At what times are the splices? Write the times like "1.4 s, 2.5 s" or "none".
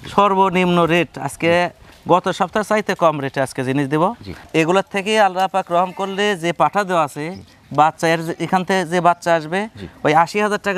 4.3 s

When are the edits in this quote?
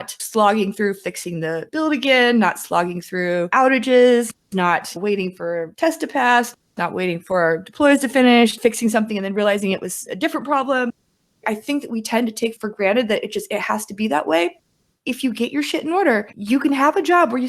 11.2 s, 14.8 s

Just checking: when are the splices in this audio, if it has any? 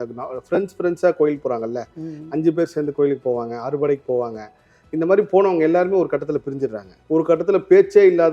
6.9 s

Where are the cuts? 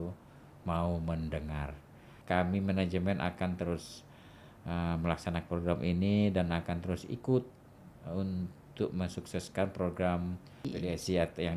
2.1 s, 10.7 s

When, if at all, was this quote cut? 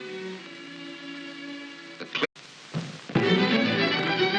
none

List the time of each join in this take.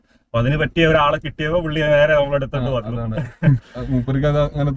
3.7 s

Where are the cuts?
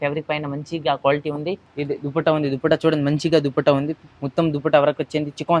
none

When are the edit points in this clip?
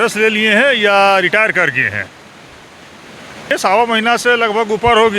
3.5 s

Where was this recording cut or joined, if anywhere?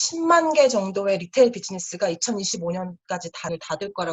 none

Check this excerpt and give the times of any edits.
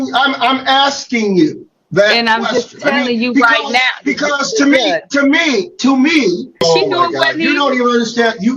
6.6 s

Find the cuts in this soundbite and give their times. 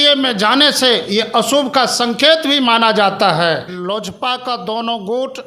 3.7 s

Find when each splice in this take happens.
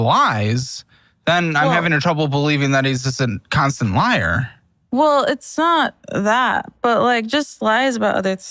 none

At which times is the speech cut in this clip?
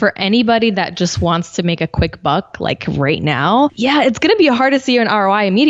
3.8 s

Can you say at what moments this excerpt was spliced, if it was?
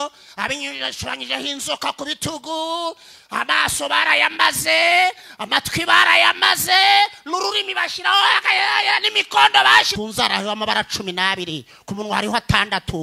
9.9 s

